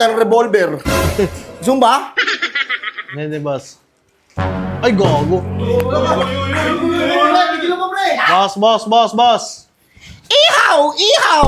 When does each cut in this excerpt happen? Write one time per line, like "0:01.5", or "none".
none